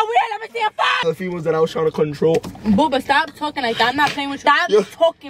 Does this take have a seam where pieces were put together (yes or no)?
yes